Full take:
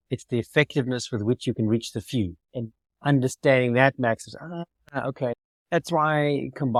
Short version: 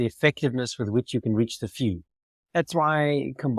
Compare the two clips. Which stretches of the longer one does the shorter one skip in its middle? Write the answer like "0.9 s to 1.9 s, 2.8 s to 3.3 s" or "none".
2.7 s to 5.5 s